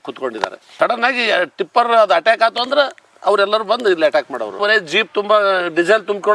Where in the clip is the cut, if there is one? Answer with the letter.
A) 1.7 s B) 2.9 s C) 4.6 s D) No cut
C